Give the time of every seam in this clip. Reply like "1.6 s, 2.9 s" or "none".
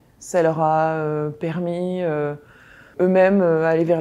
2.9 s